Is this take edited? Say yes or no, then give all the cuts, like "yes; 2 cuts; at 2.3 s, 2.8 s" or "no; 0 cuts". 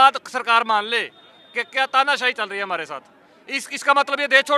no; 0 cuts